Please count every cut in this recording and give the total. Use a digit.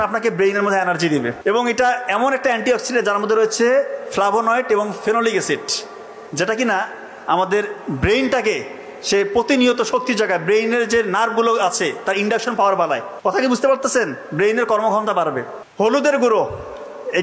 3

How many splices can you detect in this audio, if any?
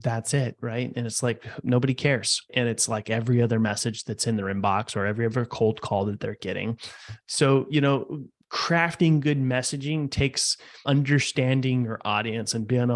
3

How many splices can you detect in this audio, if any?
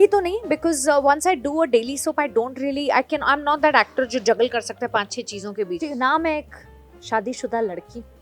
1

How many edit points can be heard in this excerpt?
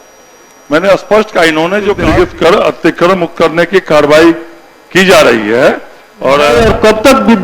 2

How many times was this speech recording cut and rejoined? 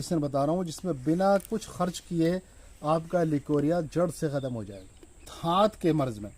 1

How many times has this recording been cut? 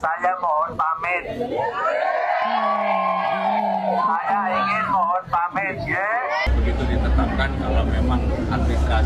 1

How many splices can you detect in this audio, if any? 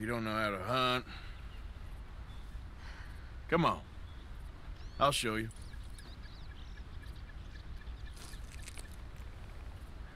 0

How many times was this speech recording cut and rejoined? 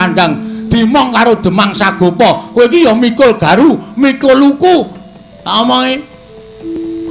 0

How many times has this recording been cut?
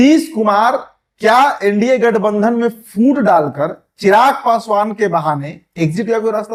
0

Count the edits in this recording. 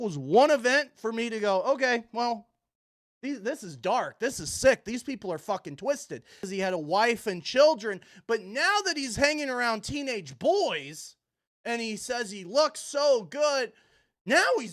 1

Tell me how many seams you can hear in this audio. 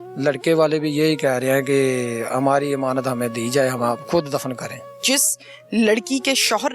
1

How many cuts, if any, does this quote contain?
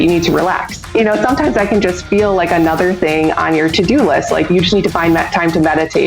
2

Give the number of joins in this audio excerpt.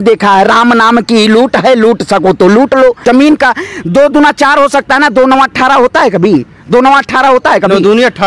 1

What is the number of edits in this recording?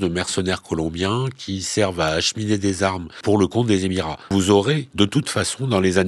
3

